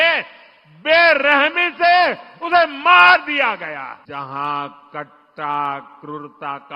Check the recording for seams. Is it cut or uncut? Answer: cut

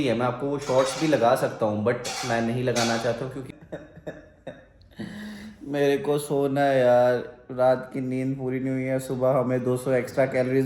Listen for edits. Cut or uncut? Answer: cut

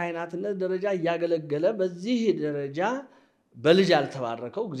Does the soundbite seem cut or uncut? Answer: uncut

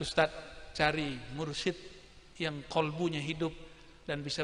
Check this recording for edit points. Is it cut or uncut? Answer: uncut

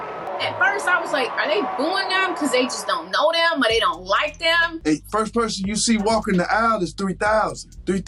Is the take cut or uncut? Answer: uncut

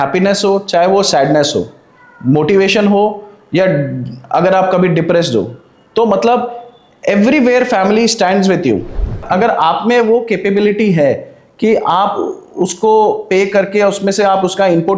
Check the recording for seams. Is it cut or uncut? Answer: cut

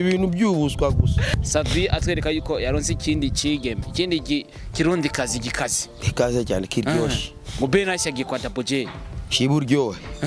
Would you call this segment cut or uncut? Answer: cut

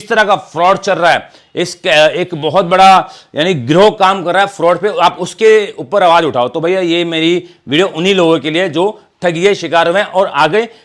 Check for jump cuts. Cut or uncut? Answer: uncut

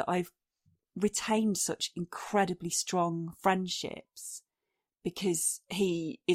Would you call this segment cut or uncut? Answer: uncut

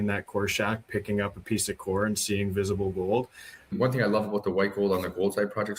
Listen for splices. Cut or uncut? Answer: cut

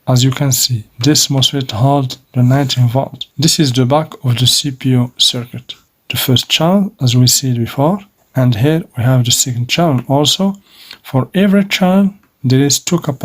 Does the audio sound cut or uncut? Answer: cut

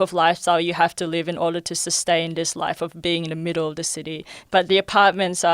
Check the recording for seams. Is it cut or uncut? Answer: cut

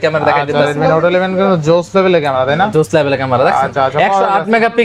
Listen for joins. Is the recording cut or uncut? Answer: uncut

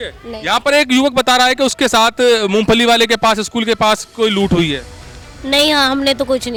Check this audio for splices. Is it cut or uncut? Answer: uncut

